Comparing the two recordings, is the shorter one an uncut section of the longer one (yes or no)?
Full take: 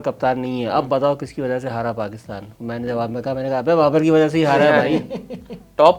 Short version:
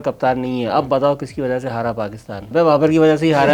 no